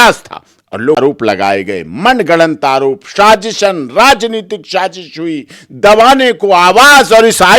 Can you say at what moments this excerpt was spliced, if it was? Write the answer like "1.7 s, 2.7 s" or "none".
1.0 s

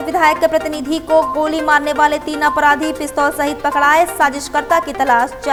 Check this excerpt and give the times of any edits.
none

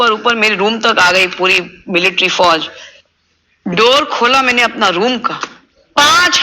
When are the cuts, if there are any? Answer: none

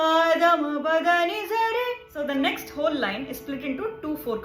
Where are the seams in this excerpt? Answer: 2.1 s

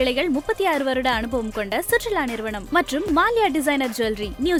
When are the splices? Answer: none

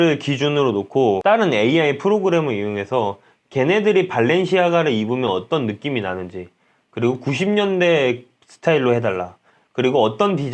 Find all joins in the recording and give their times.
1.2 s

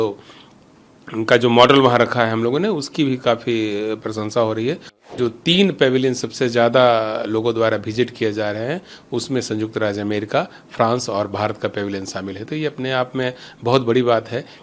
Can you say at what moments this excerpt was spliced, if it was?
5.0 s

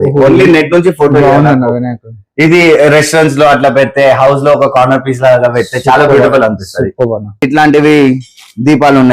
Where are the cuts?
7.4 s

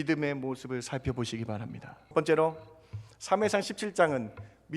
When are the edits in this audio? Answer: 2.1 s

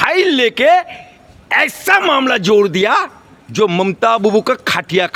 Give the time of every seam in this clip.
none

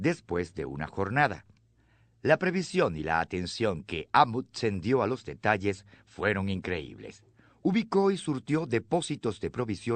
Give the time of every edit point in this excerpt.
5.9 s

